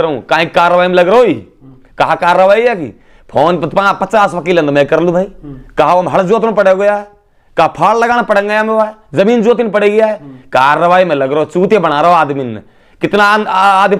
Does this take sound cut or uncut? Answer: uncut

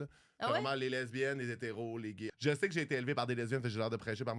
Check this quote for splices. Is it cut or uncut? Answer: cut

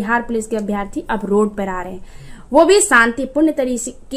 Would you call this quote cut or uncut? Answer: uncut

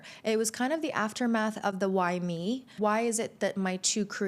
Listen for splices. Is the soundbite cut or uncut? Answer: cut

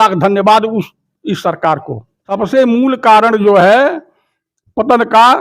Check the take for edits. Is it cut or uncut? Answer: cut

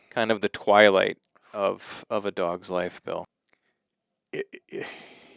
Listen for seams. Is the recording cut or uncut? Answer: cut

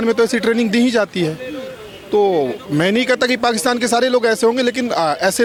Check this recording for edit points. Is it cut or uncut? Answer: uncut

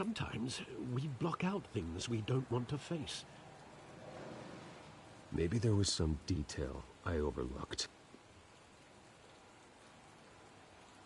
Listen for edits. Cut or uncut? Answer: cut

